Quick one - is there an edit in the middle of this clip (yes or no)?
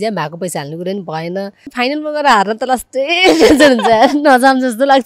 yes